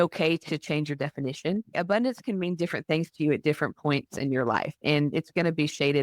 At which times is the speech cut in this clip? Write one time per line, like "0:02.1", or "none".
0:01.7